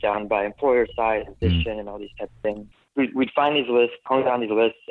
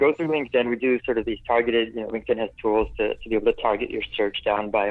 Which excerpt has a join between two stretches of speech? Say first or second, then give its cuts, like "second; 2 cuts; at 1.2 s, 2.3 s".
first; 3 cuts; at 1.4 s, 2.7 s, 4.0 s